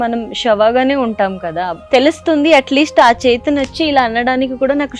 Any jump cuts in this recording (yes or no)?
yes